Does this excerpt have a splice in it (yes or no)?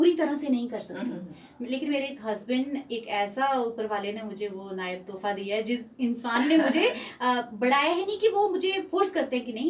no